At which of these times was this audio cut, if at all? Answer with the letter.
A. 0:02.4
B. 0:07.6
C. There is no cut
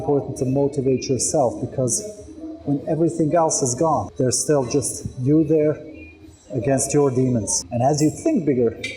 B